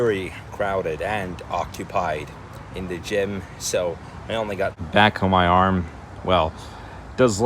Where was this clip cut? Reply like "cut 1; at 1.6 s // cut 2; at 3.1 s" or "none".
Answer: cut 1; at 4.8 s